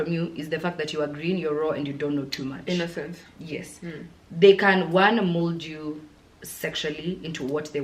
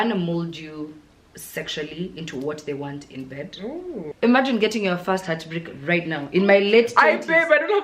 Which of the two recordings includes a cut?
second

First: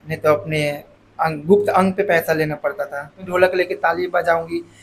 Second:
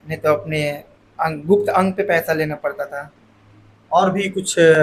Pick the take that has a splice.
first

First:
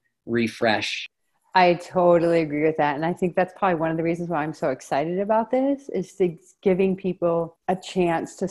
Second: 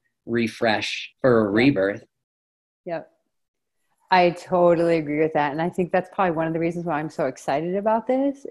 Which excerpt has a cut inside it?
first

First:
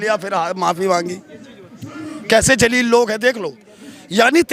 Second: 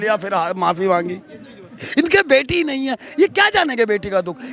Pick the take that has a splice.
second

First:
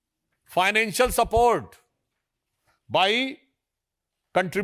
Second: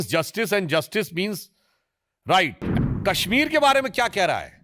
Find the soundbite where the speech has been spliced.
second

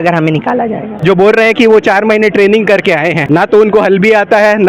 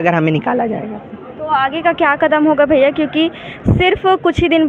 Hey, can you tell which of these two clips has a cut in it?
first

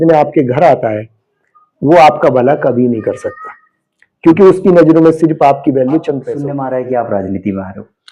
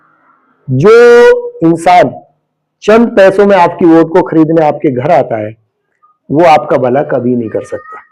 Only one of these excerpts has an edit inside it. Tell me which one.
first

